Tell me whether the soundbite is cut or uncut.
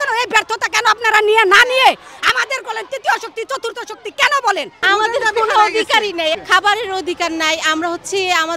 cut